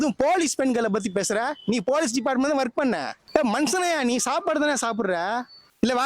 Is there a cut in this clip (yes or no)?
no